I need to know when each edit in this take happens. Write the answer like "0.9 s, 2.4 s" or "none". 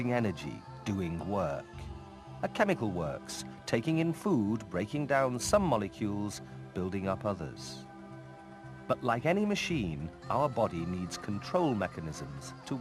9.9 s